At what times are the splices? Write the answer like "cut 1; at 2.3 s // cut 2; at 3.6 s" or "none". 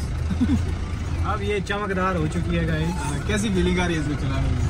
none